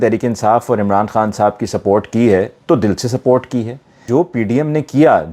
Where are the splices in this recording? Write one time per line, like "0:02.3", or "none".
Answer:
0:04.0